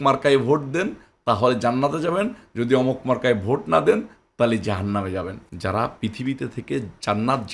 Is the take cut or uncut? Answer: cut